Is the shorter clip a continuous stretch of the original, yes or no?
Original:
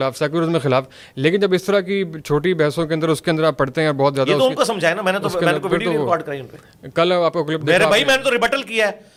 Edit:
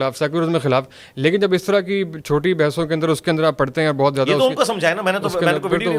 yes